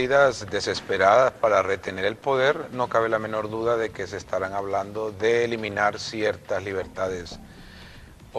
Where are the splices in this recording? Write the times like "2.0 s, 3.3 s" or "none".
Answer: 3.9 s